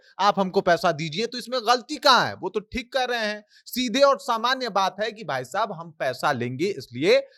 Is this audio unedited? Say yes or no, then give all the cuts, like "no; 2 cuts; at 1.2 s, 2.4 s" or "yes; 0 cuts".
yes; 0 cuts